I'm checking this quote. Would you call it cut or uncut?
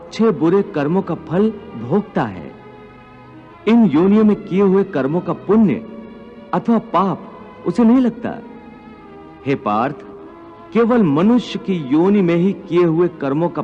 cut